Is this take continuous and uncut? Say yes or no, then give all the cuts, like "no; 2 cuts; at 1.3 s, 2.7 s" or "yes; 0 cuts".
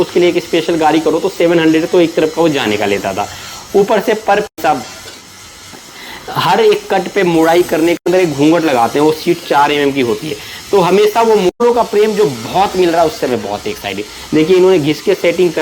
no; 3 cuts; at 4.6 s, 8.1 s, 11.5 s